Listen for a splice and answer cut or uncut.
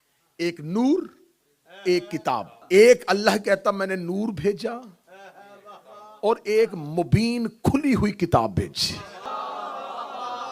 cut